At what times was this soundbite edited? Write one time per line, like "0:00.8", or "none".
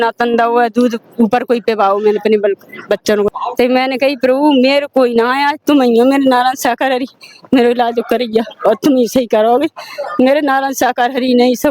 0:03.3